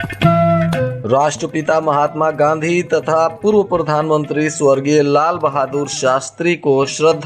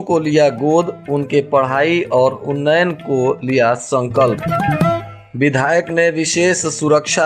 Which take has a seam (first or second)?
first